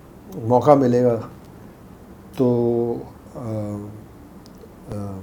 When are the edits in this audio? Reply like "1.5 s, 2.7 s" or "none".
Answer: none